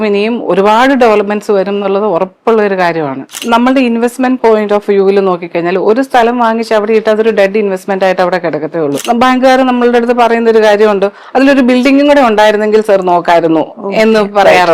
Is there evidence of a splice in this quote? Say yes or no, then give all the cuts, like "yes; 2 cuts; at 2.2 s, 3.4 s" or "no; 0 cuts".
yes; 2 cuts; at 3.4 s, 9.0 s